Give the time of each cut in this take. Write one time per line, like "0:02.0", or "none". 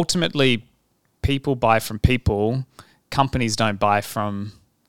none